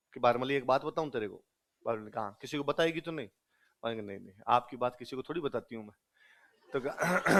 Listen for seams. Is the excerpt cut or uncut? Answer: uncut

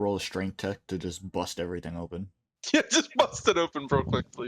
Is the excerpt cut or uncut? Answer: uncut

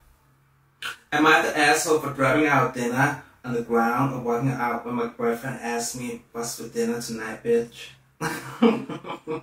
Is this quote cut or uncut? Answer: uncut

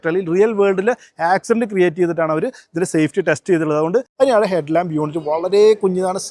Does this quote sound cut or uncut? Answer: cut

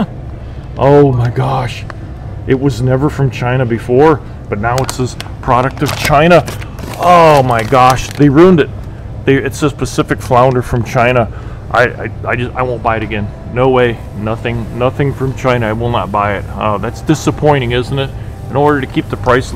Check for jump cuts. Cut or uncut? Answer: uncut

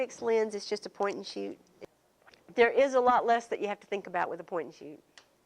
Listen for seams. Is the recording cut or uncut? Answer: cut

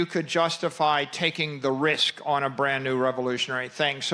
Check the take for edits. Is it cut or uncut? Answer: uncut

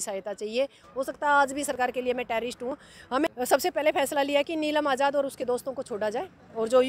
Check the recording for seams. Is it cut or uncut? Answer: cut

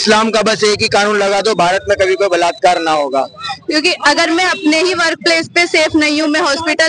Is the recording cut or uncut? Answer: cut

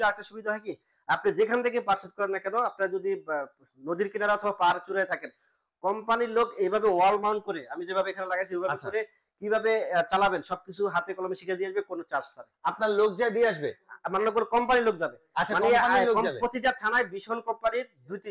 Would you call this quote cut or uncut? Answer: uncut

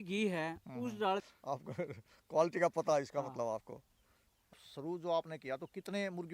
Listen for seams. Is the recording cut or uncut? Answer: cut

